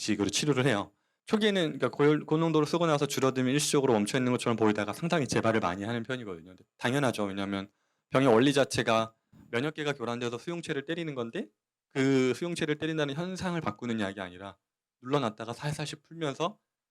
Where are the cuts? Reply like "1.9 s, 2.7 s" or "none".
1.2 s